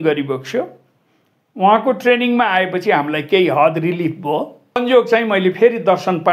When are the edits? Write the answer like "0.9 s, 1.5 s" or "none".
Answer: 4.8 s